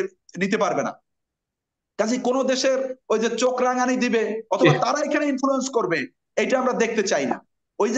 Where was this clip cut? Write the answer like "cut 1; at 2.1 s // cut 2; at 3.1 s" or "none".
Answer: none